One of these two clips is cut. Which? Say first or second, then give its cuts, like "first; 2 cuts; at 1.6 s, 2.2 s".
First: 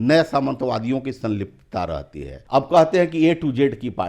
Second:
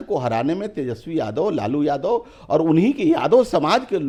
first; 1 cut; at 2.3 s